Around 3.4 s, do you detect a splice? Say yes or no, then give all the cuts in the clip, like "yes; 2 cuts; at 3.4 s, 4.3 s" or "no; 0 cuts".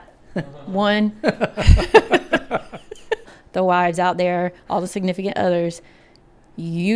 yes; 1 cut; at 3.4 s